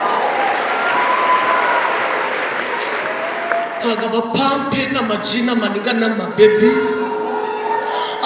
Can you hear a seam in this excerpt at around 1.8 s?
no; 1 cut; at 3.8 s

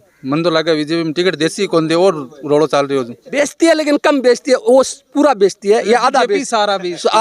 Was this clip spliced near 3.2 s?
yes; 1 cut; at 3.2 s

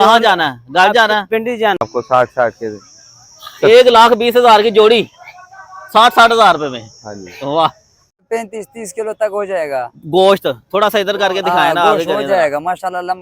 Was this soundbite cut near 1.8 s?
yes; 2 cuts; at 1.8 s, 8.3 s

